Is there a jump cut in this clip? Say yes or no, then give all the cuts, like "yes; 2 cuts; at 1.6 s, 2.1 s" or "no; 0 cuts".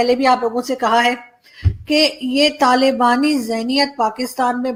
no; 0 cuts